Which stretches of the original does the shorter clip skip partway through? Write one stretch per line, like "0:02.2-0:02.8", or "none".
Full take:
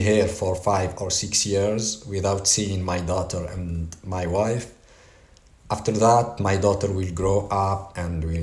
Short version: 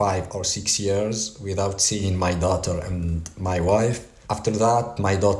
0:04.8-0:05.5